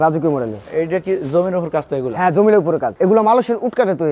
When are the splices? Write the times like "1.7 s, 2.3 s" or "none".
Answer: 2.9 s